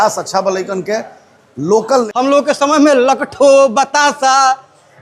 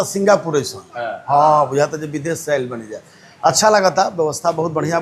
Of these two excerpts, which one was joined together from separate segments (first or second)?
first